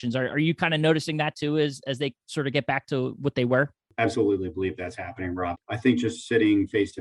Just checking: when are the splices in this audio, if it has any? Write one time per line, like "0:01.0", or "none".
0:03.8
0:05.6

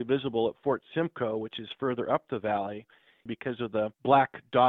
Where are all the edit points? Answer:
0:03.4

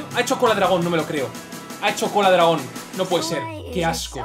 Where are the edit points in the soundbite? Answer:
none

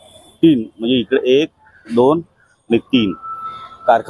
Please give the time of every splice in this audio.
none

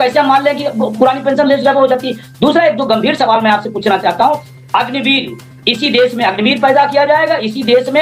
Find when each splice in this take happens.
none

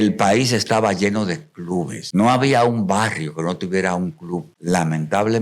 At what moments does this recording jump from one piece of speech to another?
0:02.0
0:04.5

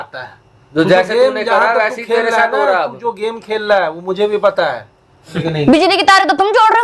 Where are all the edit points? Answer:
0:05.3

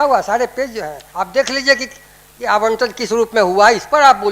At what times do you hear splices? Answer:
0:01.0

